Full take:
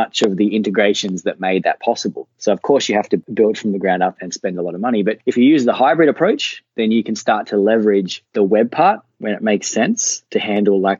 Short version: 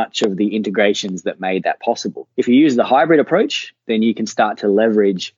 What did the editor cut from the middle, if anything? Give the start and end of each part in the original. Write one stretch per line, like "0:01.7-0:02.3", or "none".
0:02.3-0:05.2